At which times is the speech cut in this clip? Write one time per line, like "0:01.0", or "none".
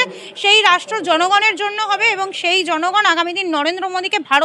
none